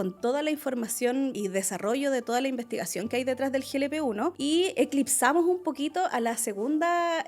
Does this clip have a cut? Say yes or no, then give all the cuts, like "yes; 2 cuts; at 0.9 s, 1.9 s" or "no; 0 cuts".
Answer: yes; 2 cuts; at 1.4 s, 4.4 s